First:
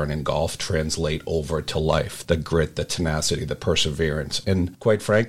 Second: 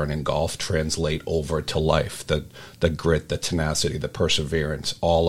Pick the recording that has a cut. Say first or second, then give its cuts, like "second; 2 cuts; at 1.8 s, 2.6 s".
first; 2 cuts; at 2.1 s, 4.3 s